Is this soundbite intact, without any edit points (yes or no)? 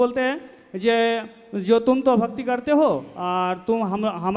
yes